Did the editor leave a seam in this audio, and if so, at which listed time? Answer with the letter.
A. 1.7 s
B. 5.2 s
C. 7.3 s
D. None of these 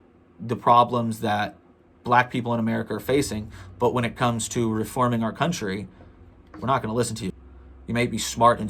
C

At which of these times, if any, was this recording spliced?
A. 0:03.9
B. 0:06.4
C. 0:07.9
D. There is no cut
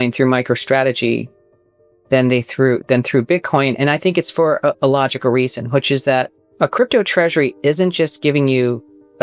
B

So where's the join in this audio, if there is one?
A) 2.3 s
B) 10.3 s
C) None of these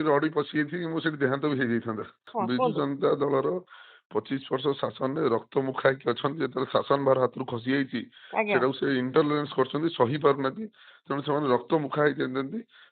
A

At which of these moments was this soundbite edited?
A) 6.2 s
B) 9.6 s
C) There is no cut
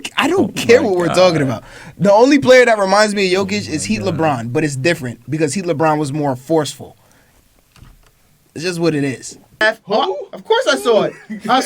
B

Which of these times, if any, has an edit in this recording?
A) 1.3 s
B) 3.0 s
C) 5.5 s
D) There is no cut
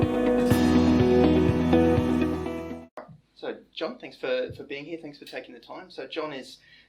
B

